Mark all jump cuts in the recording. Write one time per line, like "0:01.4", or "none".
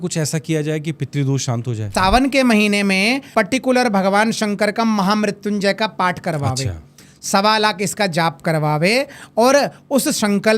0:01.9
0:03.3